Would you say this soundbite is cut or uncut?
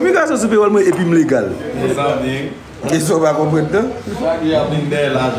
uncut